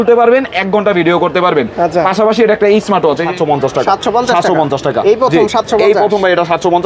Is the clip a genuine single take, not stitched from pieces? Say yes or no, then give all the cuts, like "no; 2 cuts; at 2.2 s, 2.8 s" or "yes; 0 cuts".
no; 1 cut; at 3.3 s